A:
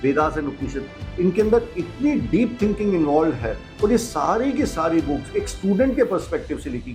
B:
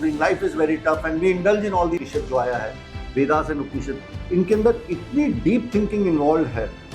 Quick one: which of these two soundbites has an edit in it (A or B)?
B